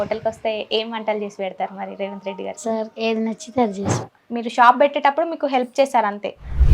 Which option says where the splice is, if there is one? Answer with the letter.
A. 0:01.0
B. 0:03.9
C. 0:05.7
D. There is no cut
B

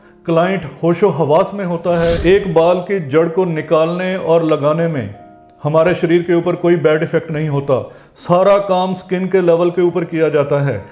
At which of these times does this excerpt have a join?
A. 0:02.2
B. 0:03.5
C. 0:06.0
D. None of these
A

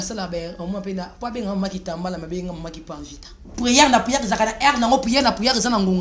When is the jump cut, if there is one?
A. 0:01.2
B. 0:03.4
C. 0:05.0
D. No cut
B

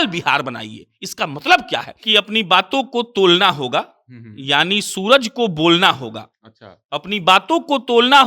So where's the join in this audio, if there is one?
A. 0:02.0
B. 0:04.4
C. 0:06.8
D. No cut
A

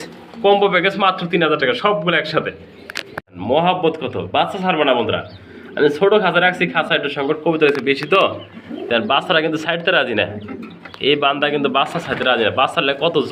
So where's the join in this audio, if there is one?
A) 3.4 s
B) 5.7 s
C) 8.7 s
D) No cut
A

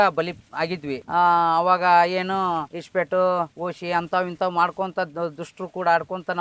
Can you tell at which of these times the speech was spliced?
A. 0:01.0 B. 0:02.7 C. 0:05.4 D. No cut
D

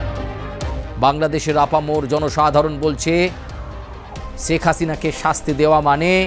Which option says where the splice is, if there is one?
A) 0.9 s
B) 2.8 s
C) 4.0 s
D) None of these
A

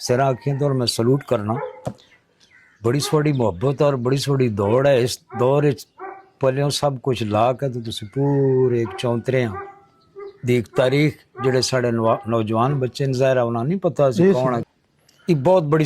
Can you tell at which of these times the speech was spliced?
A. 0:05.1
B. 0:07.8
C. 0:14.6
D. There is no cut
C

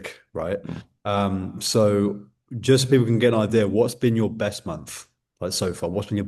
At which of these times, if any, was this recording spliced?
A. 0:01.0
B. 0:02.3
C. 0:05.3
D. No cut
D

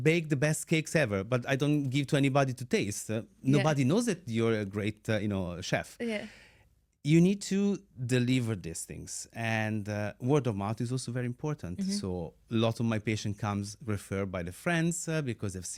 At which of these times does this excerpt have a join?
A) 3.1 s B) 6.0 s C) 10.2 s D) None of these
D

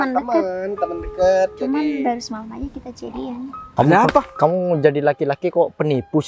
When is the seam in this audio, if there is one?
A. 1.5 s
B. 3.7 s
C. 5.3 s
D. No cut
B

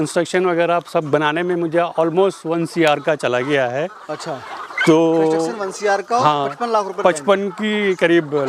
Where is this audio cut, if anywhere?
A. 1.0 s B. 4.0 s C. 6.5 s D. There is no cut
D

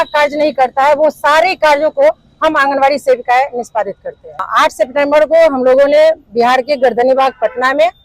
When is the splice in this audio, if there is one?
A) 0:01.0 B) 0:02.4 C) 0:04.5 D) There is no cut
C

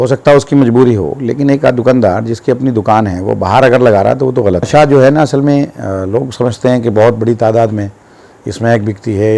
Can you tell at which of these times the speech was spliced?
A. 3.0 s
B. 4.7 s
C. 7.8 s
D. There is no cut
B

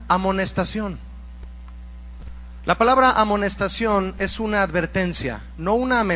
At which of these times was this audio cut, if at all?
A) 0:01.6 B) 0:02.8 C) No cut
B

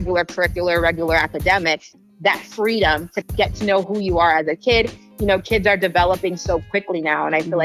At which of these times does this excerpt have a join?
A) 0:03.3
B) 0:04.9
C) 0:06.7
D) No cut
A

